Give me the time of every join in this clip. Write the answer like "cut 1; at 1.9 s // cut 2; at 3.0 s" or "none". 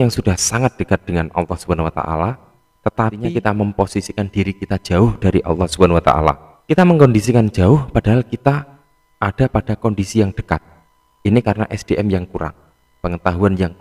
cut 1; at 3.2 s // cut 2; at 6.5 s